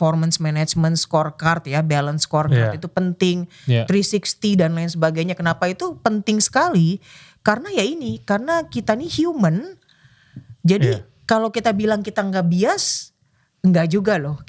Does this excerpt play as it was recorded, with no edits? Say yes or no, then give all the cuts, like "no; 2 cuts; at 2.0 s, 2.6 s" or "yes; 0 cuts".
yes; 0 cuts